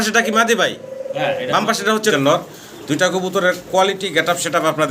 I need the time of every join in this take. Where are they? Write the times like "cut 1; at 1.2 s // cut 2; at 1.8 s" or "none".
cut 1; at 2.1 s